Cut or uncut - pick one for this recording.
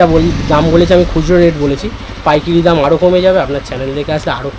uncut